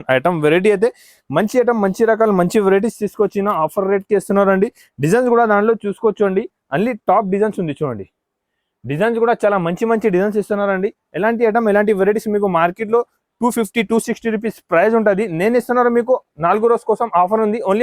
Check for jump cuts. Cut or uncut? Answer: uncut